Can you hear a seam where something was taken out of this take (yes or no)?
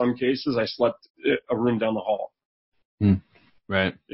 no